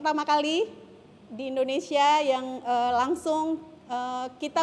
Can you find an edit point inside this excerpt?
no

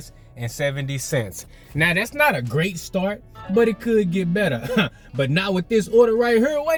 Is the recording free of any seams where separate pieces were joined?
yes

